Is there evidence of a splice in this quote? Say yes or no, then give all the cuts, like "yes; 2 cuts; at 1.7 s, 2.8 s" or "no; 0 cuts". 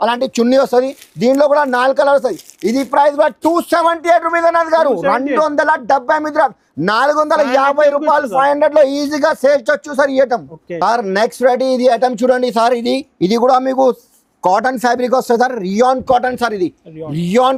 no; 0 cuts